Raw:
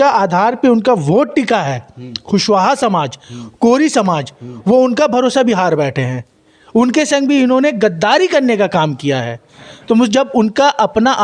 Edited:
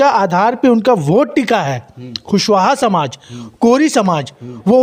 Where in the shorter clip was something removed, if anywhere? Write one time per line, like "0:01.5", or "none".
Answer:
none

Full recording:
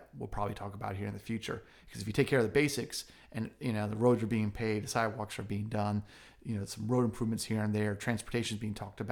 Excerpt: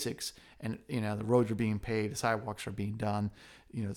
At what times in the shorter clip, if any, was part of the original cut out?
none

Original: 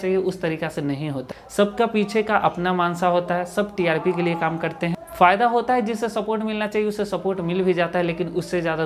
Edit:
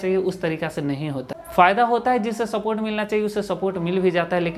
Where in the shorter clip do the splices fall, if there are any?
0:01.4

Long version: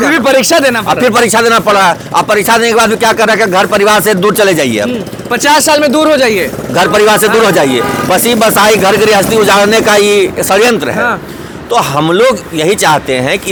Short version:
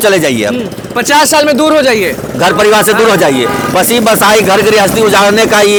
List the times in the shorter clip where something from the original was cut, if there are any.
none

